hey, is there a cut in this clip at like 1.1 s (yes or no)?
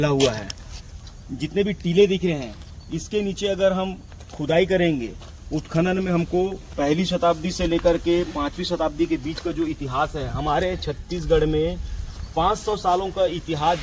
yes